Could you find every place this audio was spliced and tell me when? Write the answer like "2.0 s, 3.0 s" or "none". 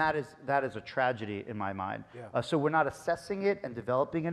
none